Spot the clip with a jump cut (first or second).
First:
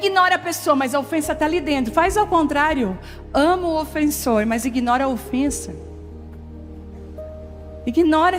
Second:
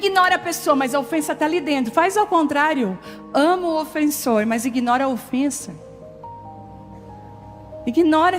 second